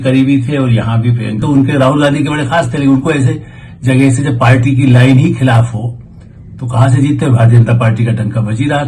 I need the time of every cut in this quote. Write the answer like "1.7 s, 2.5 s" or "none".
1.4 s